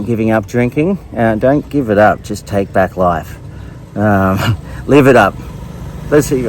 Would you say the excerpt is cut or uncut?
uncut